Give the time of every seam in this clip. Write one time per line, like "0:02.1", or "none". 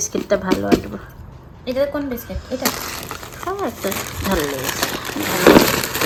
none